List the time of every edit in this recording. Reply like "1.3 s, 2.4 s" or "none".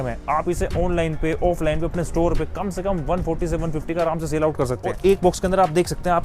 5.0 s